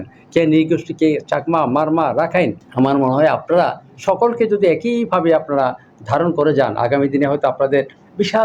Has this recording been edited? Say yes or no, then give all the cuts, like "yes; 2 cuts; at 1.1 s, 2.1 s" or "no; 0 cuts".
yes; 1 cut; at 2.6 s